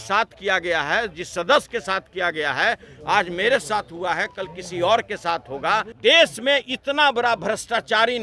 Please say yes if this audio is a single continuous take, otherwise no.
no